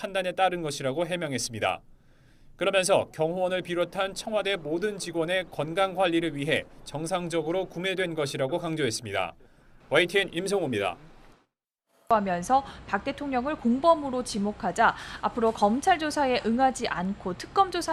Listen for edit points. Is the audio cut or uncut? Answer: uncut